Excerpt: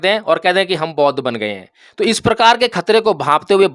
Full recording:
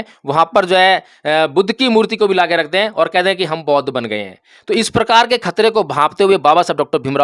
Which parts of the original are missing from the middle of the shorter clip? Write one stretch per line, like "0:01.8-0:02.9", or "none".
none